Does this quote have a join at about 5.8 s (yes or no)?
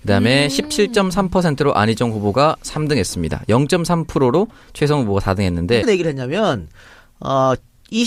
no